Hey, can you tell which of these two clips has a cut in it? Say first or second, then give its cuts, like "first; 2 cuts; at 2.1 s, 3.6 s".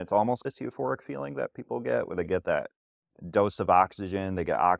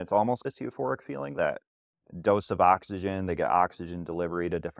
second; 1 cut; at 1.3 s